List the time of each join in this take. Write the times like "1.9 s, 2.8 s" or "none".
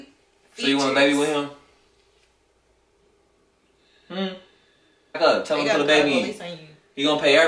5.2 s

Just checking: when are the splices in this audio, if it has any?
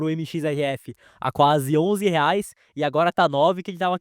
none

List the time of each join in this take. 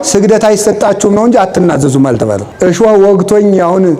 2.5 s

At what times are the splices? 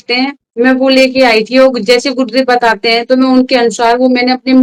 none

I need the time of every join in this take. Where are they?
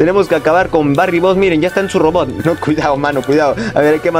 2.4 s

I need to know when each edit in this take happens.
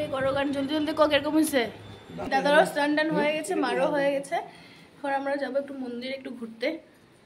2.3 s

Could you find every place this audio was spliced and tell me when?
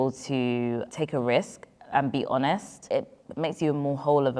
0.9 s, 2.7 s

